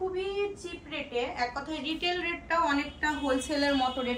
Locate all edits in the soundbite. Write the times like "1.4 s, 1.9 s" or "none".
none